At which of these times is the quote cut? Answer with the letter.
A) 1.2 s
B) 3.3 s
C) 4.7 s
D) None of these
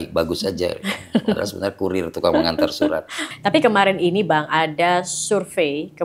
B